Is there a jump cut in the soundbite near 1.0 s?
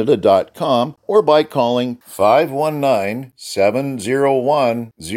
yes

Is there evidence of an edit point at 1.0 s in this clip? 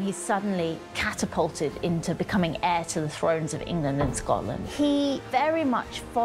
no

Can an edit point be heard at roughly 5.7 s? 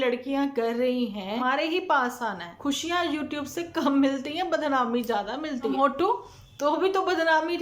yes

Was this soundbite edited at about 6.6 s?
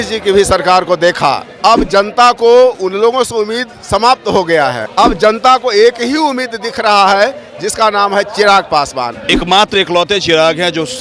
no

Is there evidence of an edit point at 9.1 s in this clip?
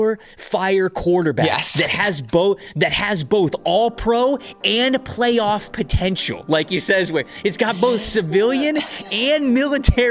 yes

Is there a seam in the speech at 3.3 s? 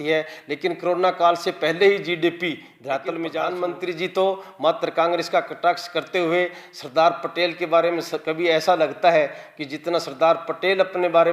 yes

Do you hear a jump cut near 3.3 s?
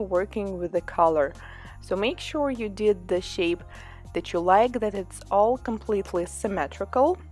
yes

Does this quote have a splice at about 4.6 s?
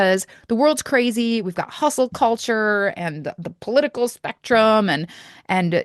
no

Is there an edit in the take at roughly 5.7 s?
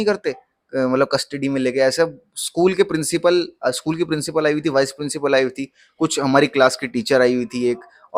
no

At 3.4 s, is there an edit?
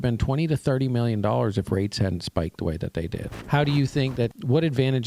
yes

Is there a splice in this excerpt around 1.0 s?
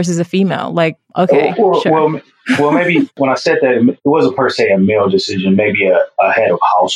yes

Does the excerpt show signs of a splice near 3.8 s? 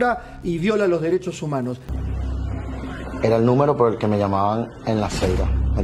no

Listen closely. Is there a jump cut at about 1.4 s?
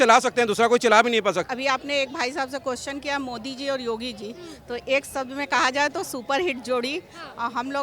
yes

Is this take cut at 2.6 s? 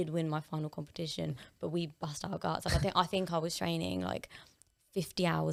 no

